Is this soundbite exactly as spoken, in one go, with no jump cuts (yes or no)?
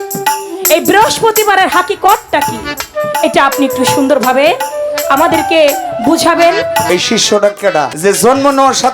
no